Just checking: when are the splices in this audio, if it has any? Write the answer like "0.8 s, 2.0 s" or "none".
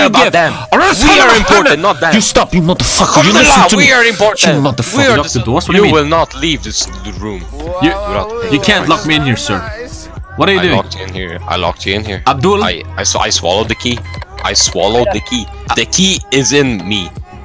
5.1 s

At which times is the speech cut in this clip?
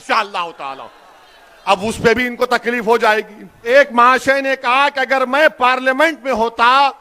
3.6 s

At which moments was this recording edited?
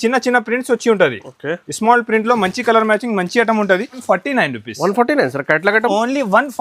4.0 s

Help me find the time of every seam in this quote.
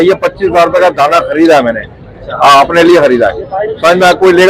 none

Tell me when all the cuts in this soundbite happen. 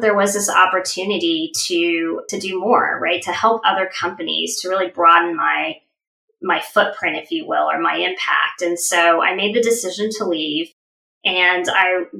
2.2 s

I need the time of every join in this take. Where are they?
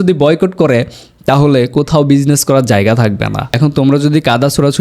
3.5 s

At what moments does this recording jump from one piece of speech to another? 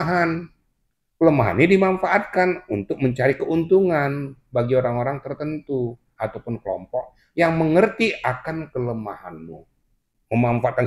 9.9 s

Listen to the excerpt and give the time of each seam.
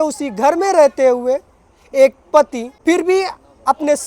2.7 s

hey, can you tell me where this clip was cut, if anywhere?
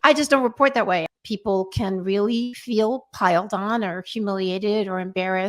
1.1 s

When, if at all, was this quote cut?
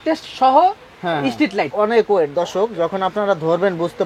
1.7 s

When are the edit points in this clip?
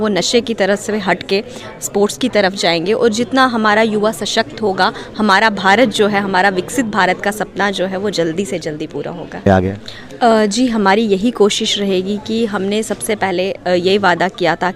9.5 s

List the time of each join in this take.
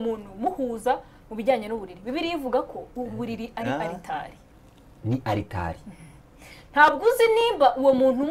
none

